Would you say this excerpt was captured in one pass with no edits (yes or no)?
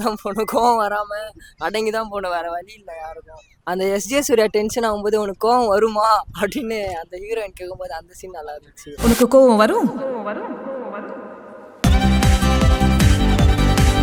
yes